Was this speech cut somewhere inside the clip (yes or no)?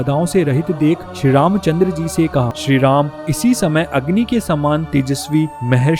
yes